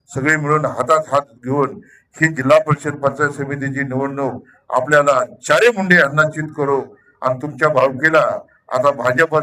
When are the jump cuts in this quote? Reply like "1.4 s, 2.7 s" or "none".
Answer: none